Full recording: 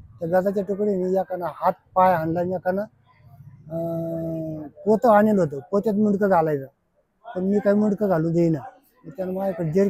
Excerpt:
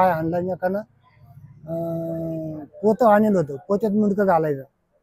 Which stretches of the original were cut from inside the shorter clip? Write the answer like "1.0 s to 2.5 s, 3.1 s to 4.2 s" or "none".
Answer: none